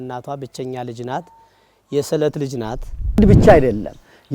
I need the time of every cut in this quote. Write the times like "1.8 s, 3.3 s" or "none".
3.2 s